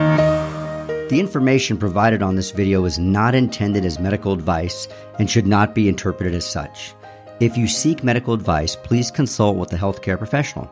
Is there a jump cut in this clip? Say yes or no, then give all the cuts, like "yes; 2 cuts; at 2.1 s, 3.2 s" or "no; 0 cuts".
yes; 1 cut; at 0.9 s